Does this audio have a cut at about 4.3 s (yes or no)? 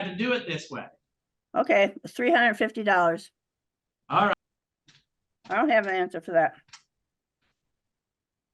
yes